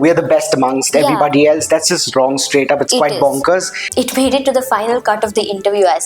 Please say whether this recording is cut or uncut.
cut